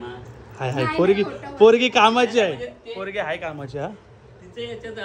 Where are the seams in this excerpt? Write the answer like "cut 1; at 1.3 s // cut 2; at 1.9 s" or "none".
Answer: none